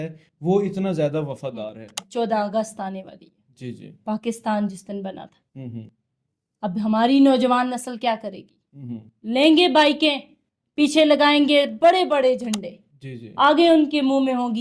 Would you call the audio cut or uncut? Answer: cut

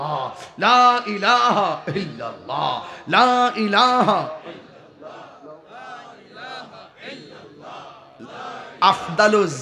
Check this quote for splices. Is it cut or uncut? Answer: uncut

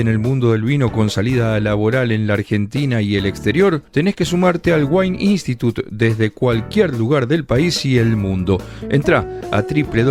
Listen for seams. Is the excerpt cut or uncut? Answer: uncut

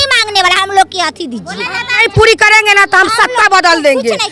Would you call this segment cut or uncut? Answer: cut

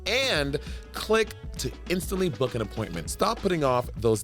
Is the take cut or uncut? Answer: cut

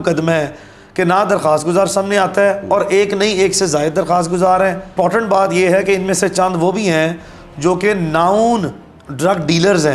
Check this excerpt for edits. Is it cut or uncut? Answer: cut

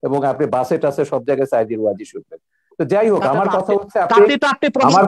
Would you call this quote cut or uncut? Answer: uncut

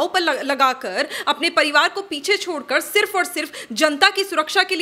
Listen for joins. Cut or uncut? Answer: uncut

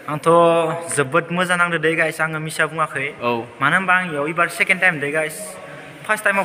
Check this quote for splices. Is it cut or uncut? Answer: uncut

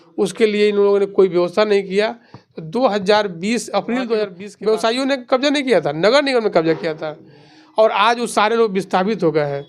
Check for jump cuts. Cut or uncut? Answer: cut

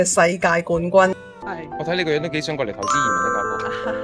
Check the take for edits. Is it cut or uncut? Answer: cut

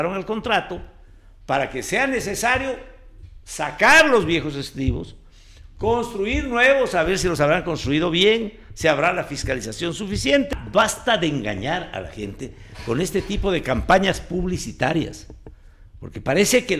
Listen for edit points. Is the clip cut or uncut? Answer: cut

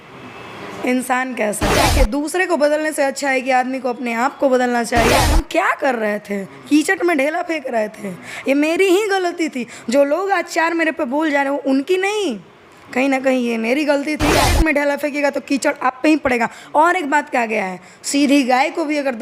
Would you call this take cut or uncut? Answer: cut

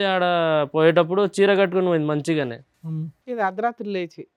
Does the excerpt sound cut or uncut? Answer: uncut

